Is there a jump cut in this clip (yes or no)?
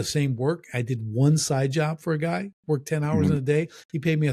no